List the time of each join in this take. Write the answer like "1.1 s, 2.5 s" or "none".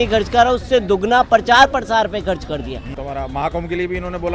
2.9 s